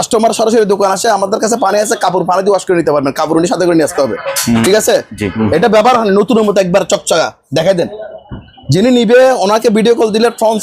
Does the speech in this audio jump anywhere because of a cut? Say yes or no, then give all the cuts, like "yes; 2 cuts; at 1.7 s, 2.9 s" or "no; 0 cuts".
yes; 1 cut; at 5.2 s